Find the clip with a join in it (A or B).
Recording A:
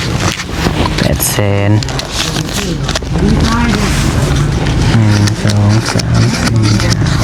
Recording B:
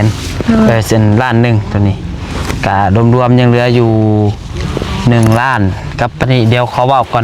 B